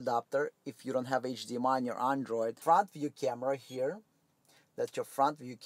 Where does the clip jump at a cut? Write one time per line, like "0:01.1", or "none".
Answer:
0:02.6